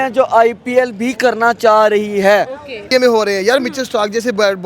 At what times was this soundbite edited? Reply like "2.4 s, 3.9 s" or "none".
2.9 s